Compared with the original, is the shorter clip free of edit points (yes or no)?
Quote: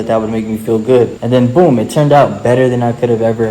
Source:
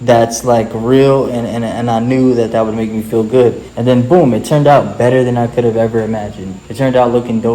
no